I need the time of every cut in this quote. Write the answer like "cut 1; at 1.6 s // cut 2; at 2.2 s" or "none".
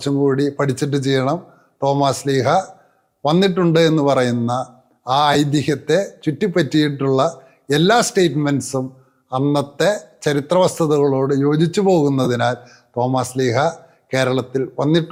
none

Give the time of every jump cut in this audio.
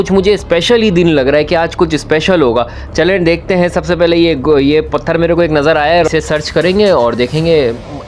none

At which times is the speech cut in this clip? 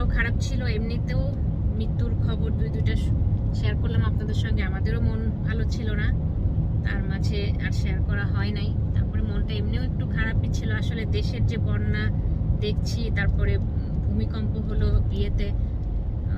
none

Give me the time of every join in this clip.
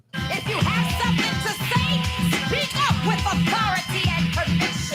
none

